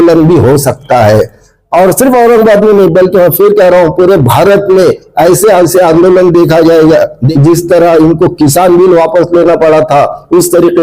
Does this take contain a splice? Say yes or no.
yes